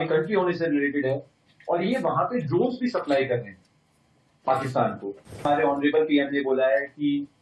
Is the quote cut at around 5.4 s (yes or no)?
yes